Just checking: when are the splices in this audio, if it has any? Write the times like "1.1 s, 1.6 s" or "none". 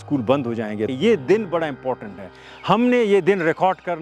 0.9 s

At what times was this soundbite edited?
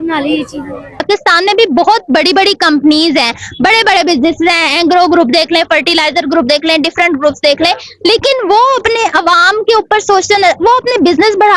0.9 s

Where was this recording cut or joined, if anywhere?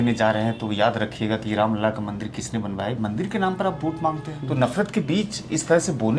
4.3 s

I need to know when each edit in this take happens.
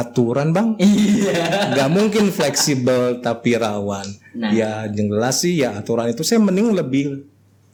none

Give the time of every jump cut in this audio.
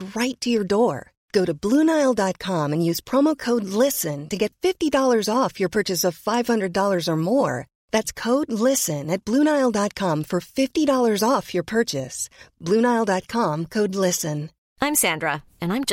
none

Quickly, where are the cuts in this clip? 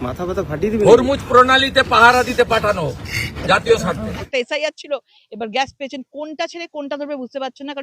4.2 s

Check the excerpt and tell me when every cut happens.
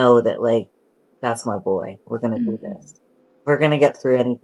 none

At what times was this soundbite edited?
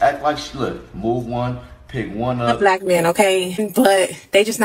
2.6 s

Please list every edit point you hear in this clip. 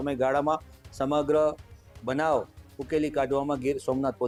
none

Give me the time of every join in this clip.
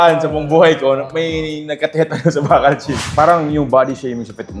3.0 s

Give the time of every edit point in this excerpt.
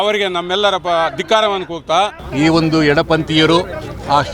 2.2 s

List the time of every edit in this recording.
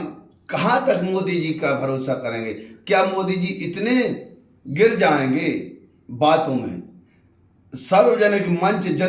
none

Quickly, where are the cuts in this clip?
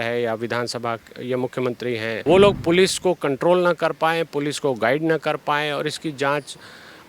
2.2 s

